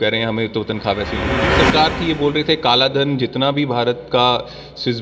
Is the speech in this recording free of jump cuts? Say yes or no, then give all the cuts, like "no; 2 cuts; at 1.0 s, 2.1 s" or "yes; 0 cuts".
no; 1 cut; at 1.3 s